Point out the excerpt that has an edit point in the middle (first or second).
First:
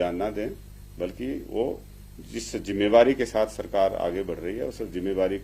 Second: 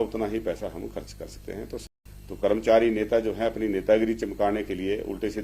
second